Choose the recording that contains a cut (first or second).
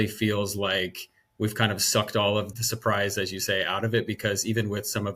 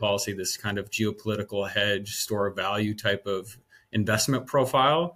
first